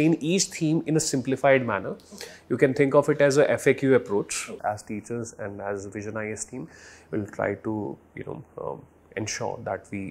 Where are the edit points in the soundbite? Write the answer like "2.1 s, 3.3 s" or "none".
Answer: 4.5 s